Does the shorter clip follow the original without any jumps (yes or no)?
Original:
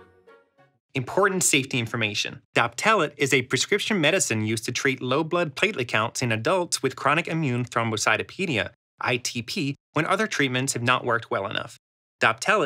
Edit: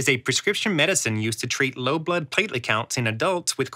yes